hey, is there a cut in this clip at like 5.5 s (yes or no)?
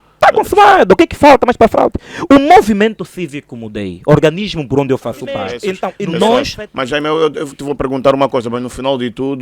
yes